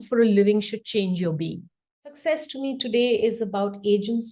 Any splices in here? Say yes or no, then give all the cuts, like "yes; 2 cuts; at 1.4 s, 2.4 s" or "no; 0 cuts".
yes; 1 cut; at 2.2 s